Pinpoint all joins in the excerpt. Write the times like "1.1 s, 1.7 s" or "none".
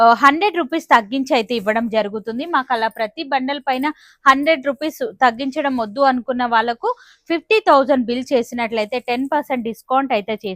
none